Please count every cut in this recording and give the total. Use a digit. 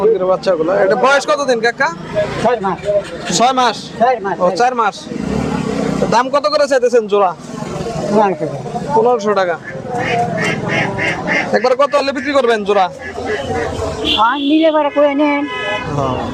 0